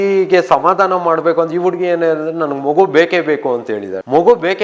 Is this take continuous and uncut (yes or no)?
yes